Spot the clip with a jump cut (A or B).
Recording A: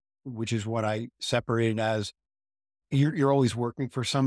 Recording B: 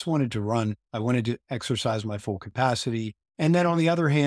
B